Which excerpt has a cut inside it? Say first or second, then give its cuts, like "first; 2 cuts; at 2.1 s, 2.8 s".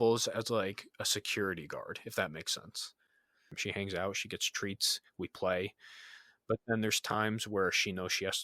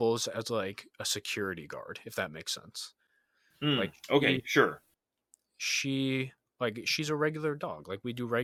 first; 1 cut; at 3.4 s